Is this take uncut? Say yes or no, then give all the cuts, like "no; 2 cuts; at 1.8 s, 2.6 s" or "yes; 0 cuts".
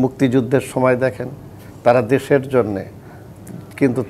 yes; 0 cuts